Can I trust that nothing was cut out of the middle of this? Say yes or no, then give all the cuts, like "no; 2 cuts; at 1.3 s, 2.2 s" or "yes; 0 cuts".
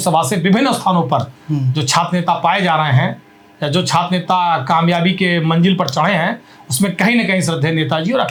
yes; 0 cuts